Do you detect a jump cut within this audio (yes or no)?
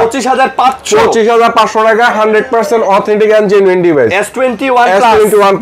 no